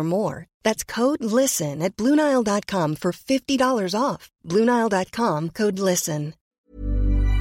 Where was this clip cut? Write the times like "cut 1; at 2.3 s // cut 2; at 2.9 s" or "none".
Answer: cut 1; at 6.4 s